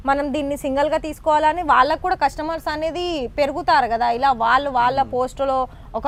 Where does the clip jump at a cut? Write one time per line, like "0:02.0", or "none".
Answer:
none